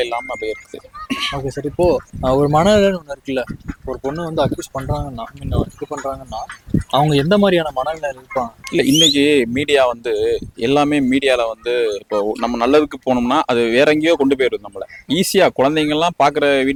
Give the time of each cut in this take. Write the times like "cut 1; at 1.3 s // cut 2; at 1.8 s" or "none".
none